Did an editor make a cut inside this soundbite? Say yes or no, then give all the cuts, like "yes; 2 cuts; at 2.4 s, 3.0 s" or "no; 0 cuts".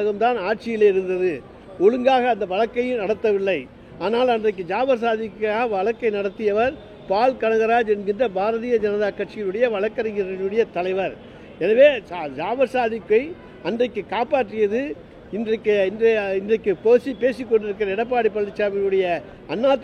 no; 0 cuts